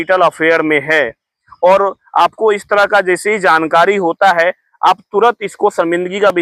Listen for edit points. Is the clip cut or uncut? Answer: uncut